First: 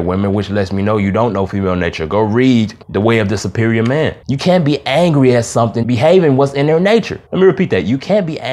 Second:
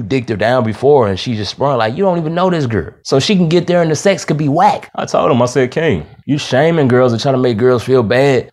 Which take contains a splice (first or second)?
second